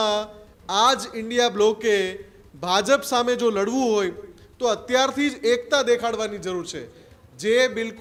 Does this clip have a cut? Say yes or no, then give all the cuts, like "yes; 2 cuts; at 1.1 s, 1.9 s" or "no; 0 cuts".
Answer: no; 0 cuts